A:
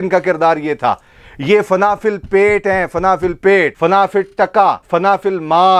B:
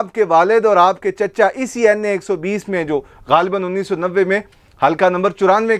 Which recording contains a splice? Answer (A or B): A